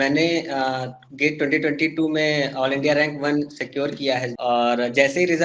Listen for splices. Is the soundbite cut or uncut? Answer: cut